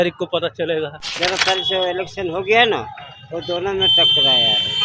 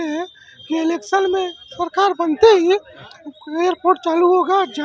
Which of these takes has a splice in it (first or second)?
first